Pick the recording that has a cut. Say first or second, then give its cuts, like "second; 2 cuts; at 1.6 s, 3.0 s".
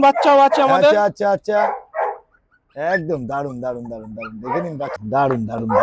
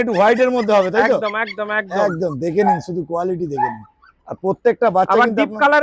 first; 1 cut; at 4.9 s